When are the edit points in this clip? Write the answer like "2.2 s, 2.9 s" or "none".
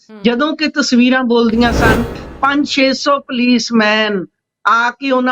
2.2 s

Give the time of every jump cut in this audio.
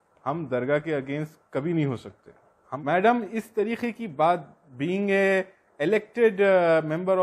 2.6 s

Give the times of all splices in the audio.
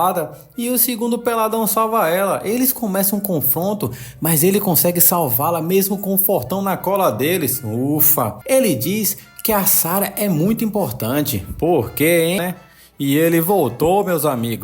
12.4 s

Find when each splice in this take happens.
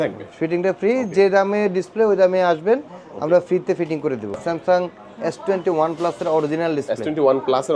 4.4 s

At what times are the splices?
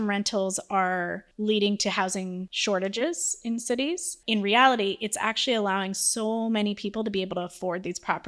1.2 s, 2.5 s, 4.1 s

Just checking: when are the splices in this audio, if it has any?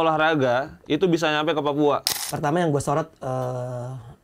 2.2 s

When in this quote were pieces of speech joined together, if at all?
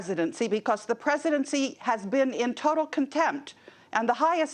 1.2 s

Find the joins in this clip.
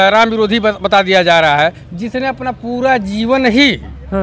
none

